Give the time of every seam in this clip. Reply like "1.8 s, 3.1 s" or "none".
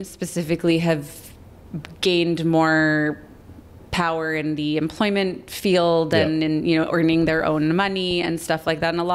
none